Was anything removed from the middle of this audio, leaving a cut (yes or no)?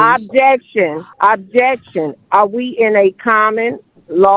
yes